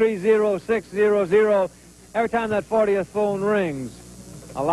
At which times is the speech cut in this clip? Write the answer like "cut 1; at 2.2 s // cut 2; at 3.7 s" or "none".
cut 1; at 1.2 s